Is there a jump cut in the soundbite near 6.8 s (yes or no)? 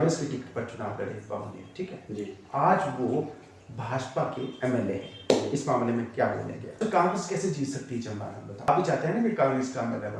yes